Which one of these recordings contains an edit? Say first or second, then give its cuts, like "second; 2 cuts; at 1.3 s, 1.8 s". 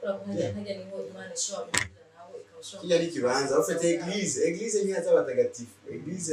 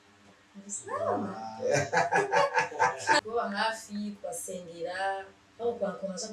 second; 1 cut; at 3.2 s